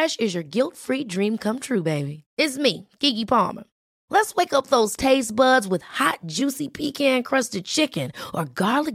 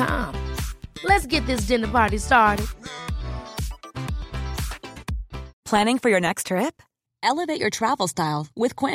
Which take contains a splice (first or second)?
second